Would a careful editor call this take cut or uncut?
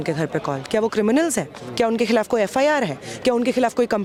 uncut